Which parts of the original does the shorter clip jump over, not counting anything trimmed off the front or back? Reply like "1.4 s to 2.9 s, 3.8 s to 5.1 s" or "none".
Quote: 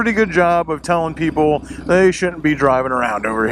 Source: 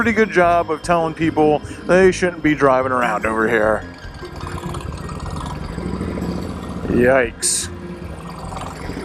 none